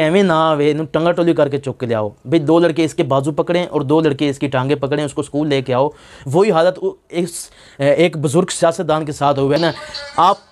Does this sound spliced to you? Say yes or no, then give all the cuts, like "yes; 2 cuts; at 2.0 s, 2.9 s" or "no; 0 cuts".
yes; 1 cut; at 9.6 s